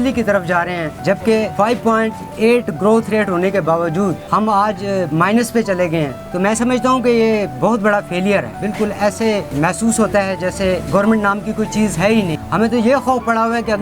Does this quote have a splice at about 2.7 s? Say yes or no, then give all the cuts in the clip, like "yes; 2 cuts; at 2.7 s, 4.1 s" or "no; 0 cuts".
no; 7 cuts; at 1.3 s, 4.2 s, 6.2 s, 8.5 s, 9.5 s, 10.8 s, 12.4 s